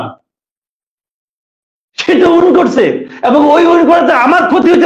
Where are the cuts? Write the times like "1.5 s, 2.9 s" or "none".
none